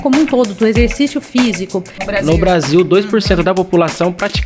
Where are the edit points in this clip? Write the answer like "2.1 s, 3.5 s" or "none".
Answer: 2.1 s